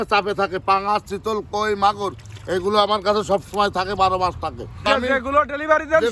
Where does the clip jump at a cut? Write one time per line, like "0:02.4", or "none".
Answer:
0:04.9